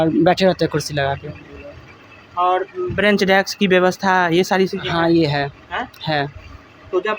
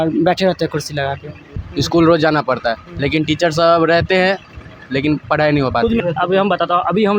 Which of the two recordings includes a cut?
second; 2 cuts; at 1.7 s, 6.0 s

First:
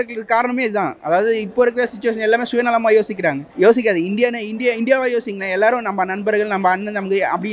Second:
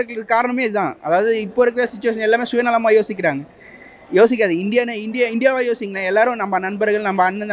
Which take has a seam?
first; 1 cut; at 3.4 s

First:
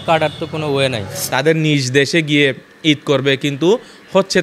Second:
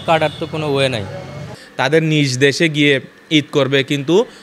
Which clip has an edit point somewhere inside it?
first; 1 cut; at 1.1 s

